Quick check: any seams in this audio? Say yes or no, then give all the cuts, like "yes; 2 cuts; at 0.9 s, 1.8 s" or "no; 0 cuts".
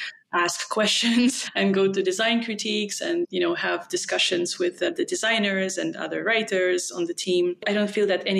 no; 0 cuts